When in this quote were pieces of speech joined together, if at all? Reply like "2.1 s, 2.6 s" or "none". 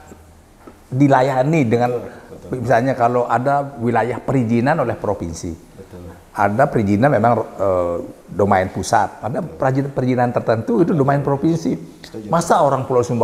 none